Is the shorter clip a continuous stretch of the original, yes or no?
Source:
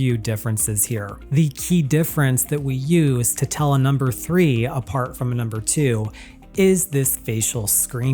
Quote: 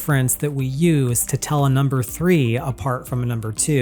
yes